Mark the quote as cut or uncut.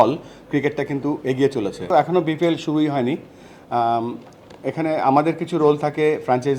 cut